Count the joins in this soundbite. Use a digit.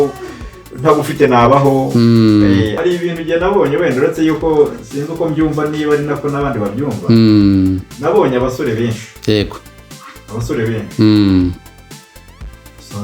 1